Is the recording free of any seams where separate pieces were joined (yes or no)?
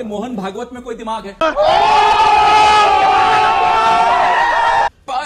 yes